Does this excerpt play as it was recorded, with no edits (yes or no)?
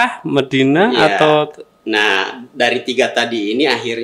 yes